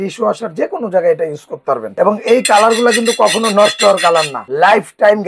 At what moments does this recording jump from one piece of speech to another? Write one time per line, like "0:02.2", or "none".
0:01.9
0:04.4